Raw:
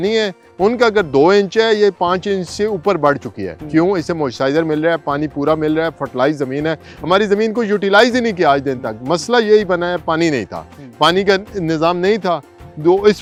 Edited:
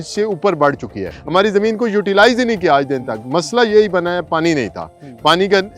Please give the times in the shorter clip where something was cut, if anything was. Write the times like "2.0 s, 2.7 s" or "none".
1.1 s